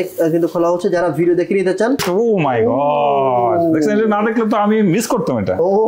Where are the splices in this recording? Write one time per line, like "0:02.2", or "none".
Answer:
0:02.0